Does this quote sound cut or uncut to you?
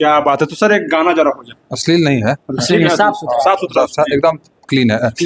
uncut